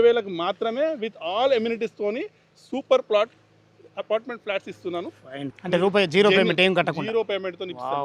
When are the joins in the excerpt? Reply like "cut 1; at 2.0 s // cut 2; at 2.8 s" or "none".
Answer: cut 1; at 5.6 s